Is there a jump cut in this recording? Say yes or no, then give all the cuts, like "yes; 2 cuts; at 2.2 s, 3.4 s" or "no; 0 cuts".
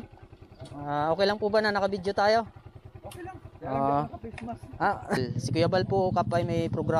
yes; 1 cut; at 5.2 s